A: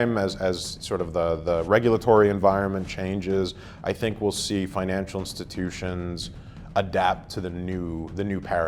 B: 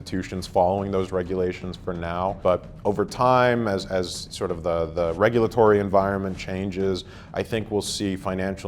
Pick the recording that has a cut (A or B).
B